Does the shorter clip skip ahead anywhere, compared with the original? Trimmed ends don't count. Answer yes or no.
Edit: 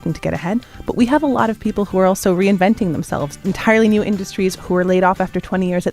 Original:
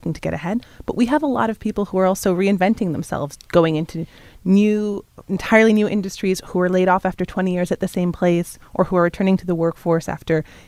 yes